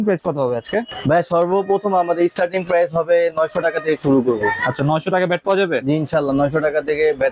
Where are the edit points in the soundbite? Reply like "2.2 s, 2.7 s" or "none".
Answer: none